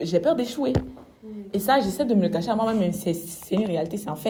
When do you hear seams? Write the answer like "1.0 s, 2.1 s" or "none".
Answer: none